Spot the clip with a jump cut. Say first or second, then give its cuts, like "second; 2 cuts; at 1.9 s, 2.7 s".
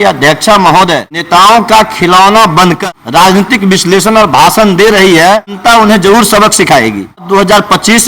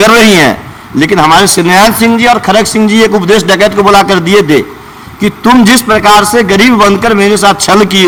first; 4 cuts; at 1.2 s, 2.8 s, 5.6 s, 7.3 s